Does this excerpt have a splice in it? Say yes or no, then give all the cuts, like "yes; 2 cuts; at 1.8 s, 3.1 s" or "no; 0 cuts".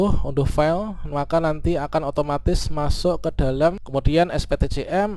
yes; 1 cut; at 3.8 s